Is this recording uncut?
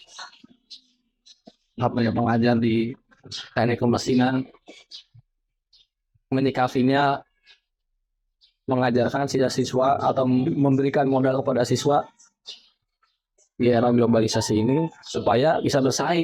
yes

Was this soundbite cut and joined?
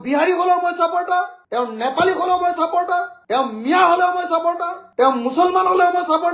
no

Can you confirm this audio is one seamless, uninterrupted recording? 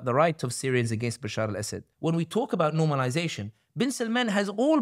no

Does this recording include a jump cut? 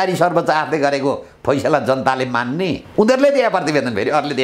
no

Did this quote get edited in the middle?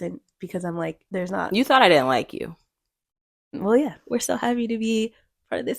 yes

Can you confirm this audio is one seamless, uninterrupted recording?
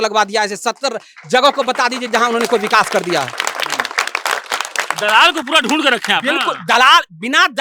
yes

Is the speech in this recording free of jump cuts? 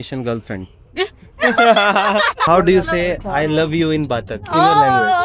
no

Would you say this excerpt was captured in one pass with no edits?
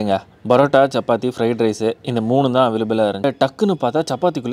no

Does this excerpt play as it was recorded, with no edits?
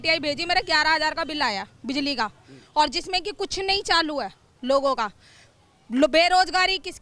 yes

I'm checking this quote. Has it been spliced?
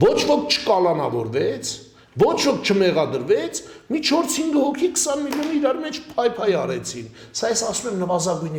no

